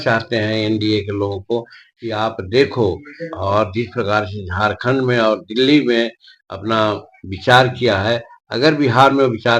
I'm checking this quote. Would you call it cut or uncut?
uncut